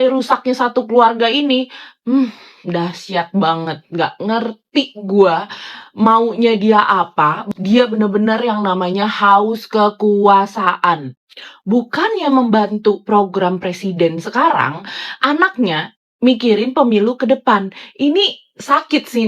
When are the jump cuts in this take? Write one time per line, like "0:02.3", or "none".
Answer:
none